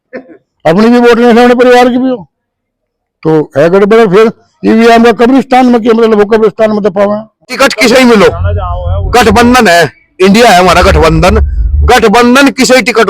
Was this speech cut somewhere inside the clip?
yes; 1 cut; at 7.5 s

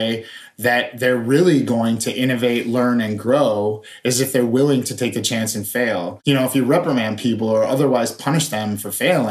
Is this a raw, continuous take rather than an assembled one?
no; 1 cut; at 6.2 s

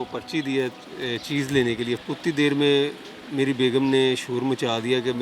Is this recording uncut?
no; 1 cut; at 2.0 s

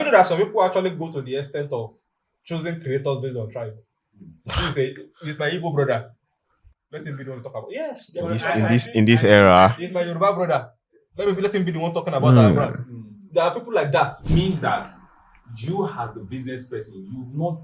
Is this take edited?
yes; 1 cut; at 14.2 s

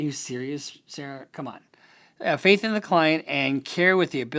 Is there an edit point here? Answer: no; 0 cuts

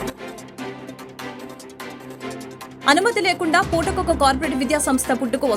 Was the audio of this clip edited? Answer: yes; 1 cut; at 2.5 s

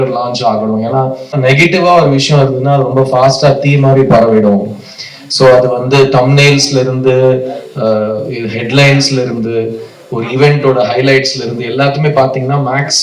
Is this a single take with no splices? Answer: no; 1 cut; at 1.4 s

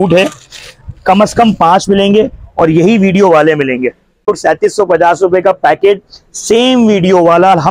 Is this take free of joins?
no; 1 cut; at 4.4 s

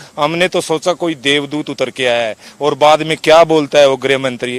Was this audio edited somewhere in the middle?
no; 0 cuts

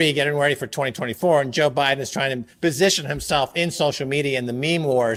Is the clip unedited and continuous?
yes; 0 cuts

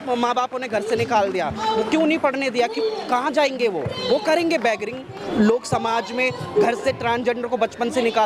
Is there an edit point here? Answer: yes; 1 cut; at 5.2 s

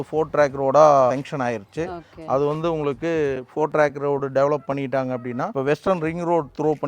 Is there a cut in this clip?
yes; 2 cuts; at 1.1 s, 5.5 s

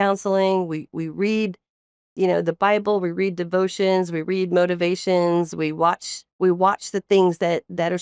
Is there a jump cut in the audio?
no; 0 cuts

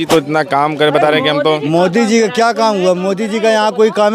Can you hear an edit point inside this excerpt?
no; 0 cuts

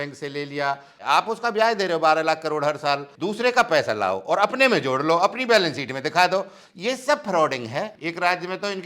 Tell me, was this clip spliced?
yes; 3 cuts; at 1.0 s, 3.1 s, 8.0 s

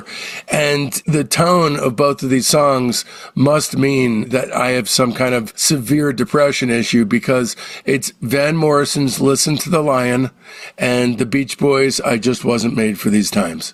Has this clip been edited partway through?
no; 0 cuts

